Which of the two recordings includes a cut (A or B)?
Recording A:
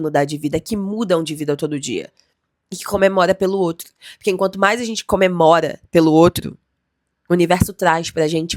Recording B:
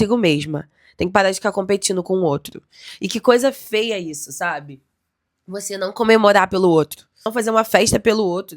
B